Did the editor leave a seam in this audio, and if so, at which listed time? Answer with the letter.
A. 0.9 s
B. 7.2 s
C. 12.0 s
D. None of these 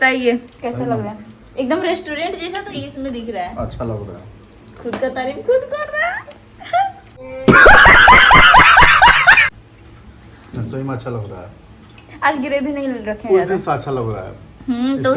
D